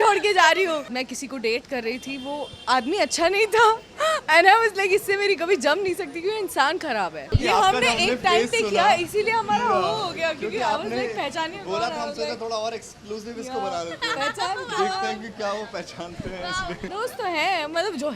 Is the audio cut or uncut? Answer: cut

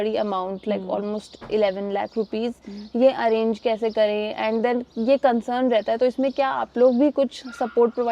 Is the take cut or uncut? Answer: uncut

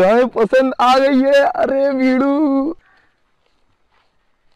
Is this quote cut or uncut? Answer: cut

